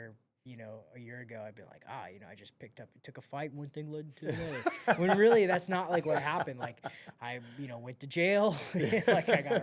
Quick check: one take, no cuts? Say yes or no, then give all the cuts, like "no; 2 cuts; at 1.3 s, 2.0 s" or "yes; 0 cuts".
yes; 0 cuts